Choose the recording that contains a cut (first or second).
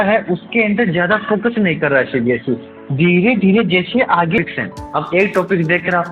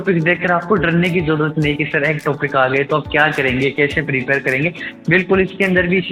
first